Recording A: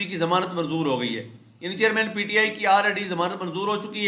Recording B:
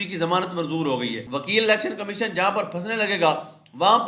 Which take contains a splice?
B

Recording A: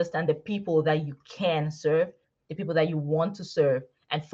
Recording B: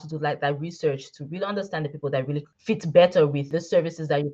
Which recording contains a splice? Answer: B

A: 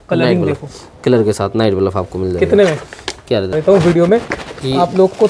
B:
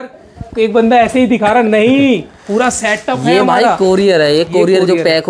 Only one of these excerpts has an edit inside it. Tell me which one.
A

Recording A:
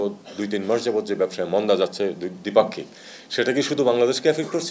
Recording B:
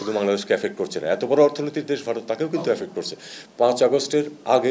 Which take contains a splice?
B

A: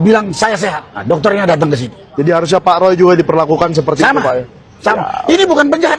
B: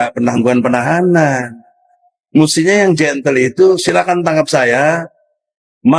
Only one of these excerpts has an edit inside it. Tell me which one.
A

